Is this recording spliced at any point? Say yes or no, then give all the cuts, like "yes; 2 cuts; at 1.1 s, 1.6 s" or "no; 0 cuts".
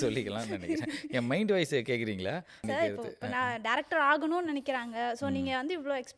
yes; 1 cut; at 2.6 s